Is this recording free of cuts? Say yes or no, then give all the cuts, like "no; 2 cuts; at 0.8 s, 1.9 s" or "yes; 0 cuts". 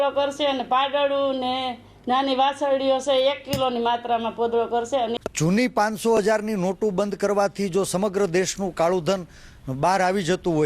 no; 1 cut; at 5.1 s